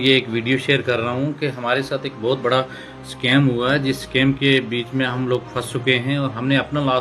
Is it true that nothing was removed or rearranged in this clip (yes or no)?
yes